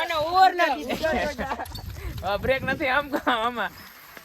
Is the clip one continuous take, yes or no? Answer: no